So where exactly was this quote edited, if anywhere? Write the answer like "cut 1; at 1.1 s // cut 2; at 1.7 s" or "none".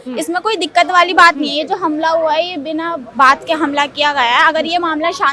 none